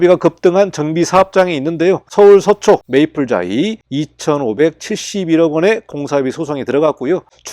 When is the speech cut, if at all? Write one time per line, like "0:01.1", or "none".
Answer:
0:02.1
0:02.8
0:03.8